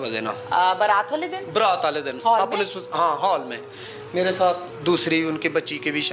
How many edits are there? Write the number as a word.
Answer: zero